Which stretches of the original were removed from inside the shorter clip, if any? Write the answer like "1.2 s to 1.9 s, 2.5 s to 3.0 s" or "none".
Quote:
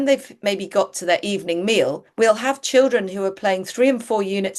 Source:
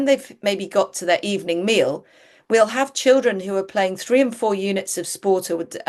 2.0 s to 2.3 s

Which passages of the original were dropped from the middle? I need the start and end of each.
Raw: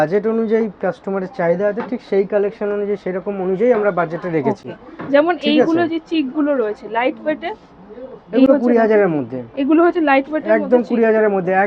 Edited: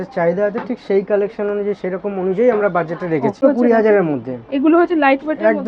4.6 s to 8.5 s

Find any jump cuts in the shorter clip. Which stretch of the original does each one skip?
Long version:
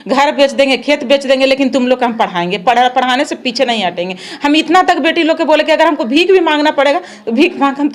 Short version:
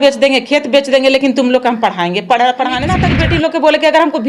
3.4 s to 4.9 s

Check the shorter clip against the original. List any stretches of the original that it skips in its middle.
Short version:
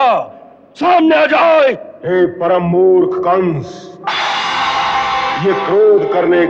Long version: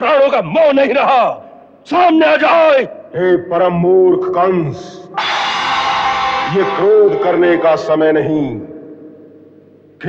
none

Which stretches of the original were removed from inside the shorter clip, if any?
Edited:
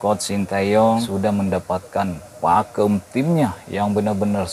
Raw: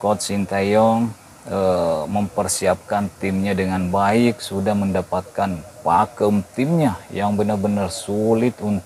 1.1 s to 4.5 s

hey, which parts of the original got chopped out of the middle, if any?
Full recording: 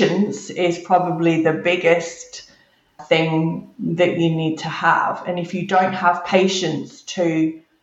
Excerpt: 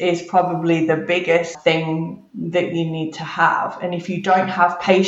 2.1 s to 3.0 s

